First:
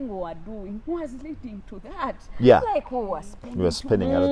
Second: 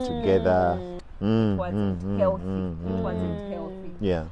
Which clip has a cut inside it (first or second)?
second